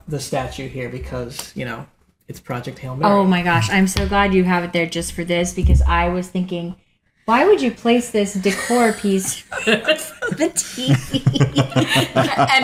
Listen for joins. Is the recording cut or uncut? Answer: uncut